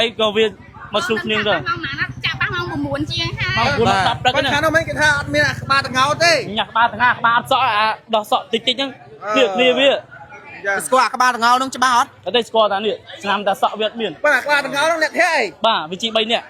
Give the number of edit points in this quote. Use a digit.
0